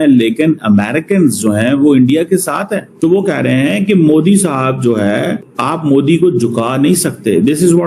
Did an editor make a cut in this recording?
yes; 2 cuts; at 2.9 s, 5.5 s

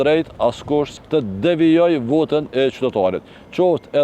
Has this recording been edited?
yes; 1 cut; at 1.0 s

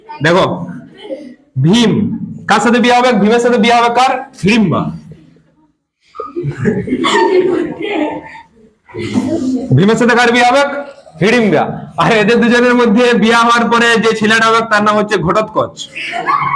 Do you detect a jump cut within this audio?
no; 0 cuts

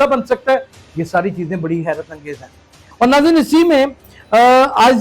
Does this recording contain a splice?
yes; 1 cut; at 2.9 s

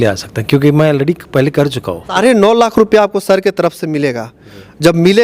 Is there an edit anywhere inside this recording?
yes; 1 cut; at 2.2 s

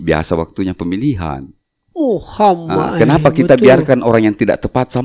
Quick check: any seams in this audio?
no; 0 cuts

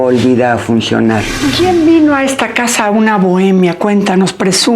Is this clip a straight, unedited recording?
no; 1 cut; at 1.4 s

